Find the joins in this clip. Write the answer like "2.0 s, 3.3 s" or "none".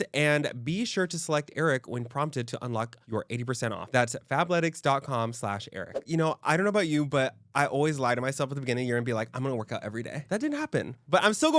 6.0 s, 10.2 s